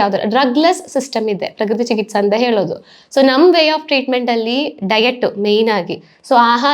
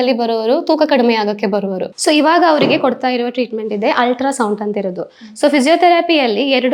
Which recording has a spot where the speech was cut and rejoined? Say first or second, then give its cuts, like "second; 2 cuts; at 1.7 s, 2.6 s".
second; 1 cut; at 1.9 s